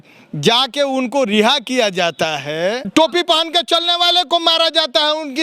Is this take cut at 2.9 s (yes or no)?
yes